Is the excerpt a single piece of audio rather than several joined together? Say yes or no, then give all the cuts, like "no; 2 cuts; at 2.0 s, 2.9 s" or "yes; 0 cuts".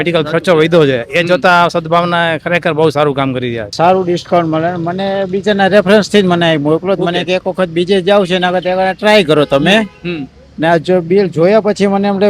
no; 1 cut; at 3.7 s